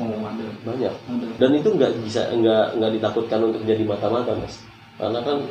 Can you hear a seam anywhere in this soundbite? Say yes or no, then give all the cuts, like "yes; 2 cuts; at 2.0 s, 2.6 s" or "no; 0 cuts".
yes; 1 cut; at 1.3 s